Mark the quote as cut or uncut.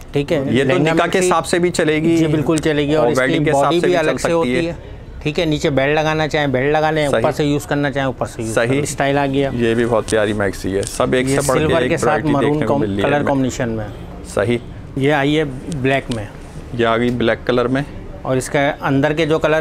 cut